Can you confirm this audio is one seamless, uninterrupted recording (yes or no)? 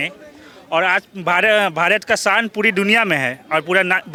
yes